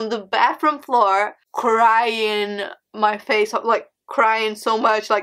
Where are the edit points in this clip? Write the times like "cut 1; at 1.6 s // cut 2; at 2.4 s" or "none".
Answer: cut 1; at 1.4 s